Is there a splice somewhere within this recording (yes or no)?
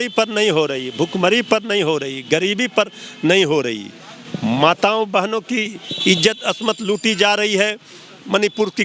no